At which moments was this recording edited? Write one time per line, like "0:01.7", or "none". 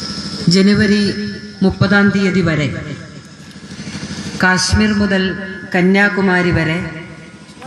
0:00.9